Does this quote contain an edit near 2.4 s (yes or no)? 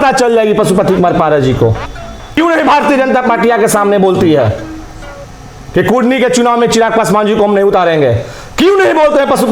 yes